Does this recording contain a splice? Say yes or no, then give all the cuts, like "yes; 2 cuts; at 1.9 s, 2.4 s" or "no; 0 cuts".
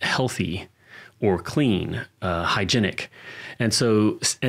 no; 0 cuts